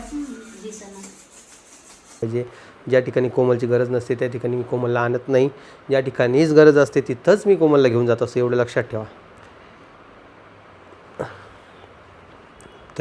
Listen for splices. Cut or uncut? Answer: cut